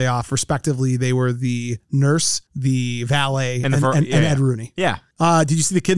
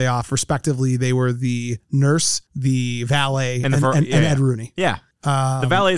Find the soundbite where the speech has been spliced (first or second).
first